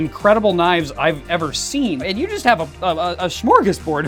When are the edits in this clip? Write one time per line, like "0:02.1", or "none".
none

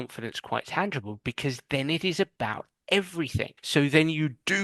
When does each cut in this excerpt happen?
0:03.6

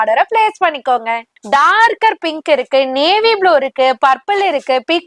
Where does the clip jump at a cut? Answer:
0:01.3

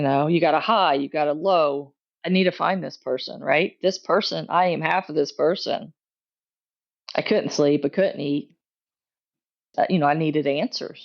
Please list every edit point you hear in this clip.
0:09.7

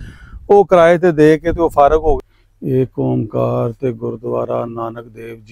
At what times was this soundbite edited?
0:02.3

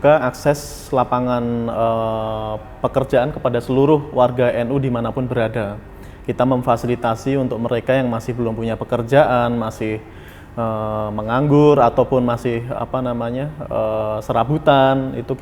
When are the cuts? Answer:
none

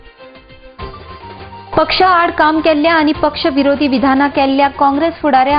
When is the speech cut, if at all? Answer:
0:01.6

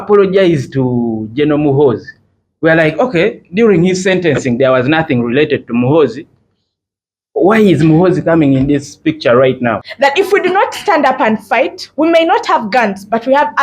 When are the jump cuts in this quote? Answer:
0:09.9

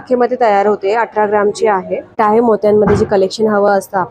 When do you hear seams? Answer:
0:02.2

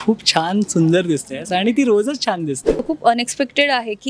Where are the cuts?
0:02.8

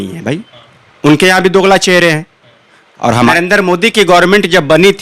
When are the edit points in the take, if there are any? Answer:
0:03.1

